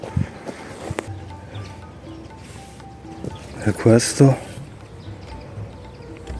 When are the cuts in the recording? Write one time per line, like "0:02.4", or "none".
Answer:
0:01.1